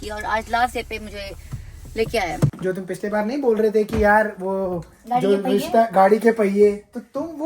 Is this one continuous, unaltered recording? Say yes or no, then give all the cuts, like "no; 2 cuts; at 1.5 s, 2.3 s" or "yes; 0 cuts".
no; 1 cut; at 2.4 s